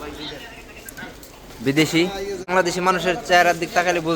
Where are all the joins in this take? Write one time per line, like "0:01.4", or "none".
0:02.5